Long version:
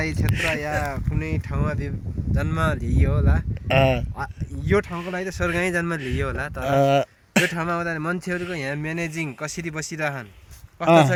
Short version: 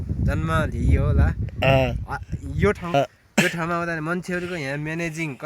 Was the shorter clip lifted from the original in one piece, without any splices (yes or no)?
no